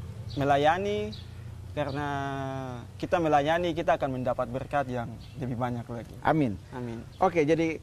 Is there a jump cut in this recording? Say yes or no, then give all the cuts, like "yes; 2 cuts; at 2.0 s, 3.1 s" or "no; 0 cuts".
no; 0 cuts